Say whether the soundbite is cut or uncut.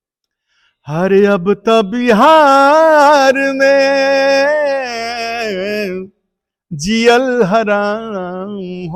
uncut